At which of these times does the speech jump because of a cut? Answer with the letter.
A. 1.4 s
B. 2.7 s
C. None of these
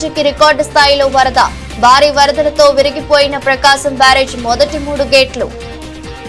C